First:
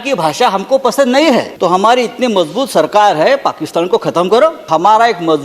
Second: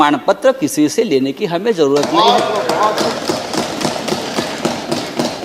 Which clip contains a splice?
first; 2 cuts; at 1.5 s, 4.7 s

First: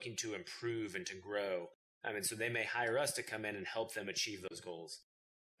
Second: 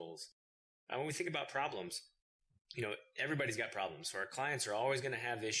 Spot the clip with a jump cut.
first; 1 cut; at 2.5 s

